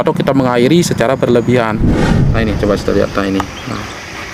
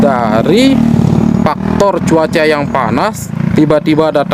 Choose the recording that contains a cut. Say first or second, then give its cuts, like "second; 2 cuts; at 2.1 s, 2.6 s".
first; 1 cut; at 2.1 s